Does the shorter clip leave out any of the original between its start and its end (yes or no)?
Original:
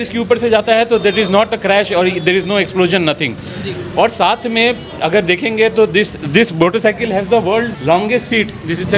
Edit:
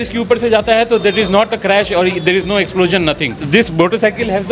yes